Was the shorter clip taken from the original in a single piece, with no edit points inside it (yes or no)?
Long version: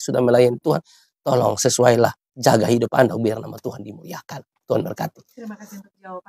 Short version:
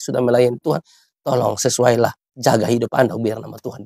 yes